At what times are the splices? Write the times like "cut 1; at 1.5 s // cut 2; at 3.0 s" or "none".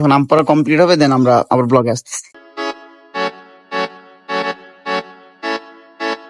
none